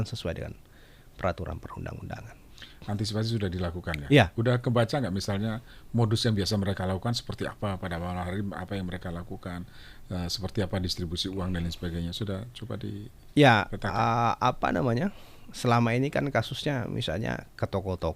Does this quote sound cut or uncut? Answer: uncut